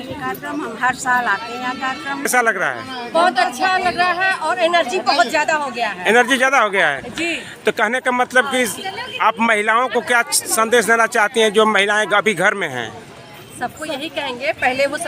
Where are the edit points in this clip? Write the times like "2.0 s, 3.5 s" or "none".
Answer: 2.3 s